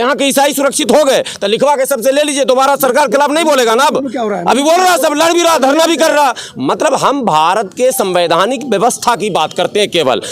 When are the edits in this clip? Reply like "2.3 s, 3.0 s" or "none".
none